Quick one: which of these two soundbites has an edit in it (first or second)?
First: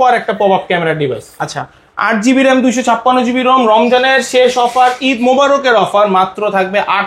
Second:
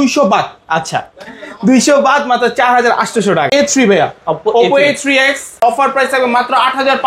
second